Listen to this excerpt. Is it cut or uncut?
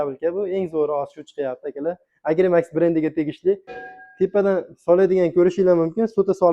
cut